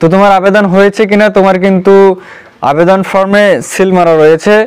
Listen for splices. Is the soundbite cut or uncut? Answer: uncut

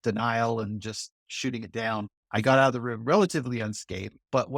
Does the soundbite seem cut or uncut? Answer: cut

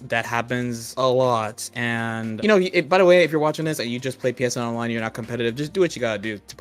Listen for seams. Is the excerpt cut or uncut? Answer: cut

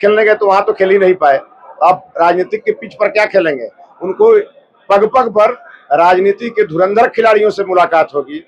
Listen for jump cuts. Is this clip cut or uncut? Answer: uncut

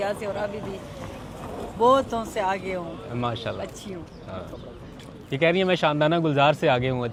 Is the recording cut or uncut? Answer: uncut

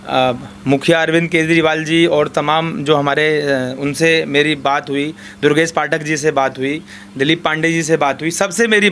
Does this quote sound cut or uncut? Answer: uncut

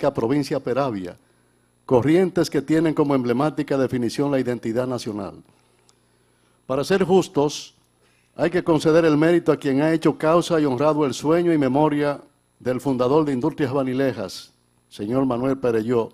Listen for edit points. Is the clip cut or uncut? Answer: cut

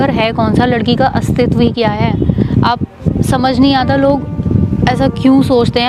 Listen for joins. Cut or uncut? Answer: uncut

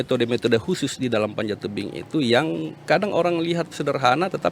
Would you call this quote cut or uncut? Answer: uncut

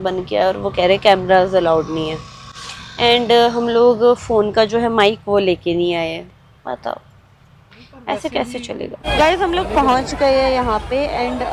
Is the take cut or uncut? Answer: uncut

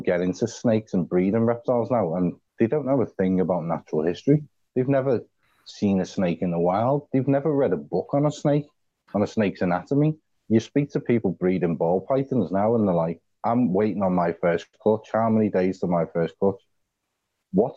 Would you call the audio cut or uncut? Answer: cut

